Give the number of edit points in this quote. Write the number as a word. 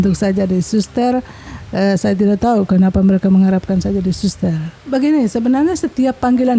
one